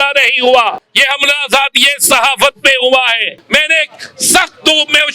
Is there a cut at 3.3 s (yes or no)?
yes